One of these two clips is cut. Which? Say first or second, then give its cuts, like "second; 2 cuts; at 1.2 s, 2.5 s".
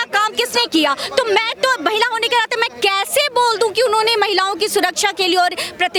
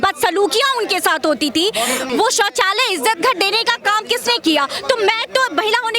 second; 1 cut; at 2.1 s